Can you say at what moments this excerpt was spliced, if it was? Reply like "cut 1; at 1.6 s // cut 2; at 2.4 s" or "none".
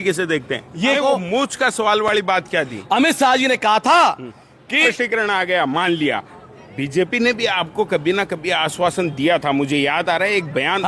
cut 1; at 0.9 s // cut 2; at 4.8 s